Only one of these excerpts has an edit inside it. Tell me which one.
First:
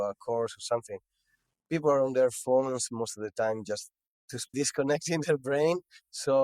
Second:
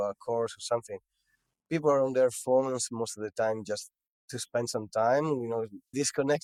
first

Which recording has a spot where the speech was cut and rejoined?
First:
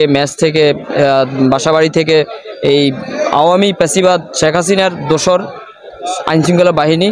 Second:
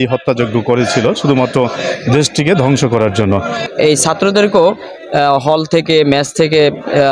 second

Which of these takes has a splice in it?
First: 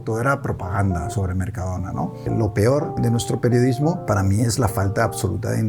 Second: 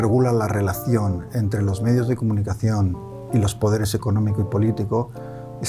first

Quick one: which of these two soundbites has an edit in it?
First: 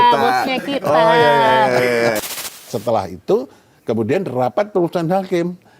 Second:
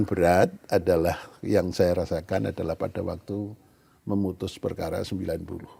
first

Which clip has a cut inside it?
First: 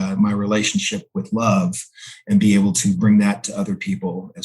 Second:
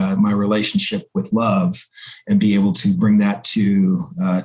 first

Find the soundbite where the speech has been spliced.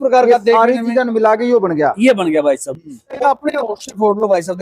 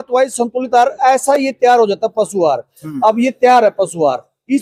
first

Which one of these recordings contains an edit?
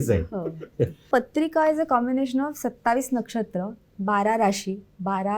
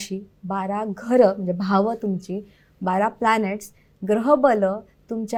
first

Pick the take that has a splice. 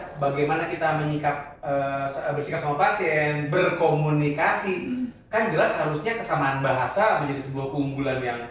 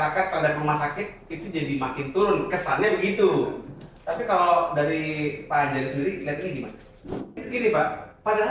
second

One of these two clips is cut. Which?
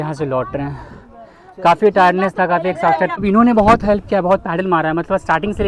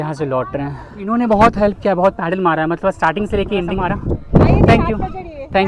second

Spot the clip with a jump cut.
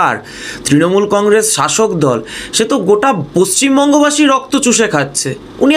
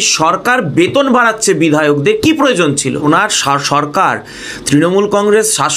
second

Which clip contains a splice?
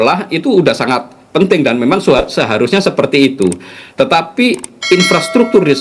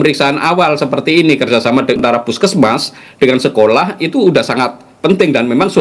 second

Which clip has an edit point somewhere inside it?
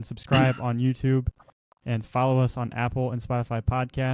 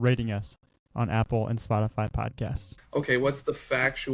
second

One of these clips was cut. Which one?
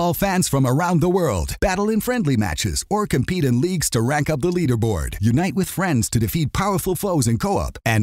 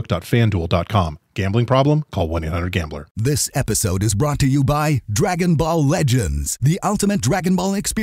second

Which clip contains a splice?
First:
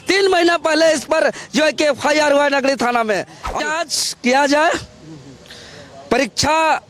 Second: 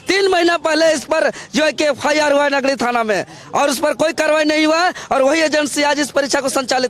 first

